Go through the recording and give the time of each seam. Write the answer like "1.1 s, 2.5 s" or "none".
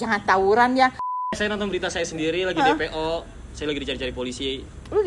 1.1 s